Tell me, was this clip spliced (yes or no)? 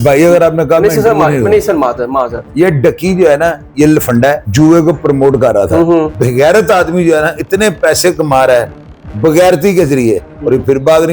yes